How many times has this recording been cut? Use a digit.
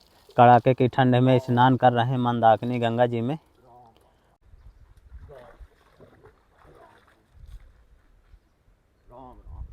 1